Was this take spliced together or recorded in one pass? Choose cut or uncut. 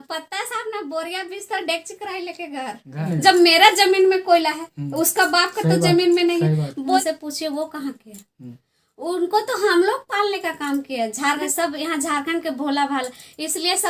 cut